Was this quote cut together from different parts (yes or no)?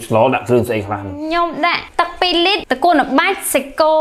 yes